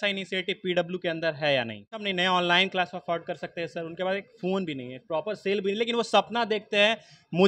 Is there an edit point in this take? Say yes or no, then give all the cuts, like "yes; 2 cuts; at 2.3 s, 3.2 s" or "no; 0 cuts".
yes; 1 cut; at 2.0 s